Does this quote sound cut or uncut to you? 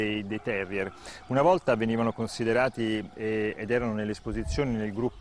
uncut